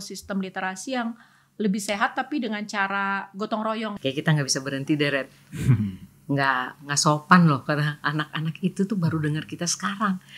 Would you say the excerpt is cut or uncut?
cut